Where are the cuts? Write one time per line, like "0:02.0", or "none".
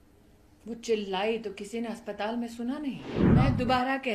0:03.1